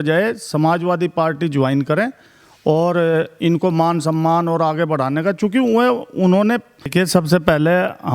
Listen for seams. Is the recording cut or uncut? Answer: cut